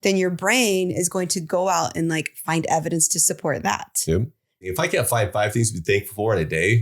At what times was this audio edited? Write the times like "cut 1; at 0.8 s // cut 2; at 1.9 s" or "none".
cut 1; at 4.6 s